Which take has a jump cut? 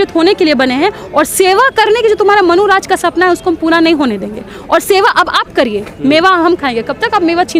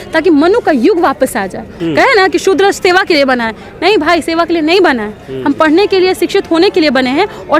second; 1 cut; at 1.7 s

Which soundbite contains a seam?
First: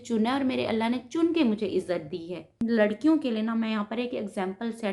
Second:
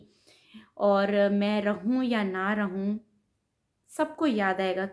first; 1 cut; at 2.6 s

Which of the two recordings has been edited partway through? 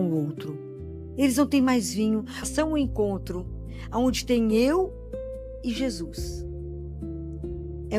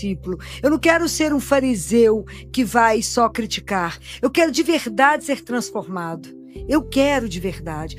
first; 1 cut; at 2.5 s

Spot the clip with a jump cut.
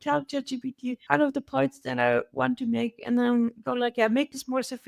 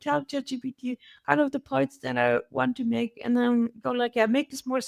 first; 1 cut; at 1.0 s

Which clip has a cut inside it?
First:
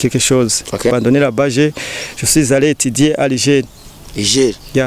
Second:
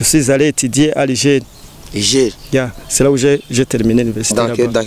first; 1 cut; at 0.9 s

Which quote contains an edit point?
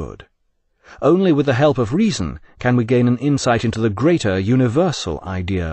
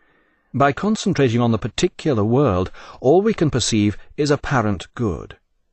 second; 1 cut; at 2.6 s

